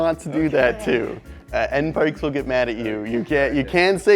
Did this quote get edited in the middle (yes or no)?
no